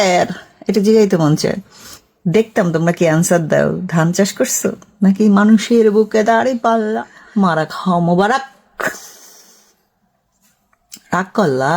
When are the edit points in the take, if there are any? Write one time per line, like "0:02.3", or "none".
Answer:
0:07.2

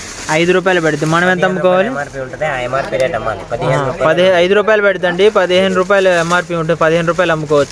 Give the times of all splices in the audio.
none

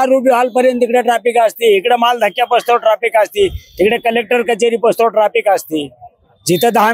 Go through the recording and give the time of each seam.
none

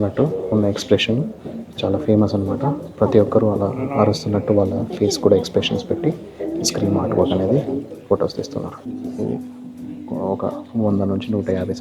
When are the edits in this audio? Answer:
none

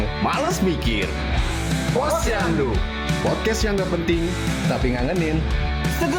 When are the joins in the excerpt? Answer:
none

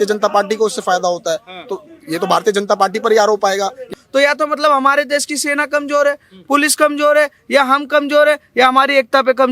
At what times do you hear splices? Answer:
0:03.9

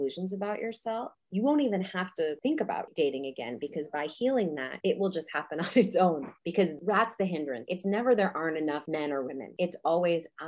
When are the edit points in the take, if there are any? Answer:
0:01.2
0:02.6
0:04.7
0:06.5
0:07.6
0:09.2

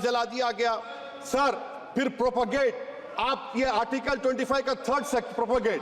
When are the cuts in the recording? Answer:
none

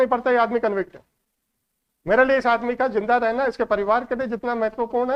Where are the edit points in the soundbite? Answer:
none

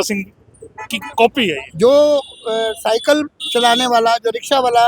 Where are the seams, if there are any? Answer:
0:01.6

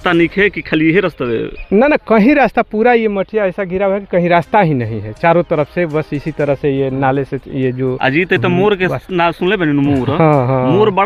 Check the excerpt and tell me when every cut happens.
none

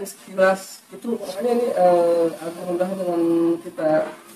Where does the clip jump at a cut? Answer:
0:01.3

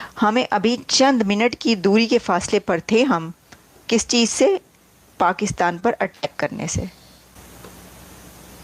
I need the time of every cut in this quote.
0:07.1

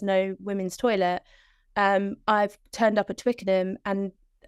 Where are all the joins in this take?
none

